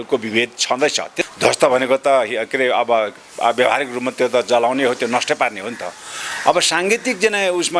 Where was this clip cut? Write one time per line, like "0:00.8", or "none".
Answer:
0:01.2